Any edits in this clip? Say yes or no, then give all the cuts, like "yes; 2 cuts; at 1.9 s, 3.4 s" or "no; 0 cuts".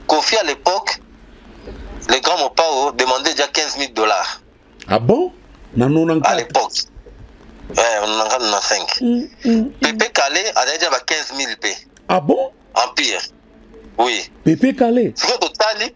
no; 0 cuts